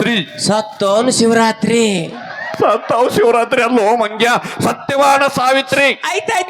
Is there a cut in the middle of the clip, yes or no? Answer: no